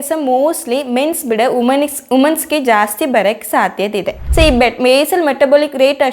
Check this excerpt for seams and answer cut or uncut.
cut